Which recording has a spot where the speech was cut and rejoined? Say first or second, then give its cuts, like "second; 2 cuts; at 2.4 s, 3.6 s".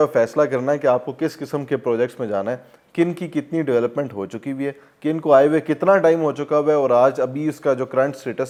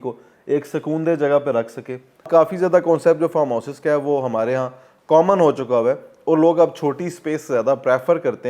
second; 1 cut; at 2.3 s